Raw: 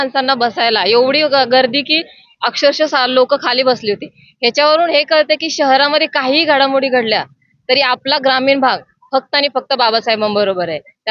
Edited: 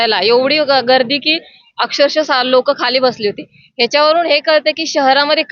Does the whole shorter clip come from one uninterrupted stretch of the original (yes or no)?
yes